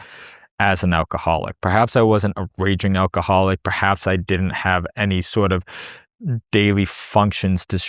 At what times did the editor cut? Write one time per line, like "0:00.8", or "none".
none